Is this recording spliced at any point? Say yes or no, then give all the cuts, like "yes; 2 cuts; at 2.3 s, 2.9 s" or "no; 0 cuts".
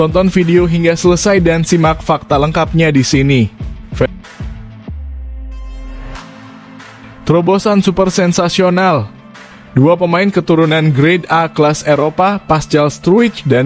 yes; 2 cuts; at 4.1 s, 7.2 s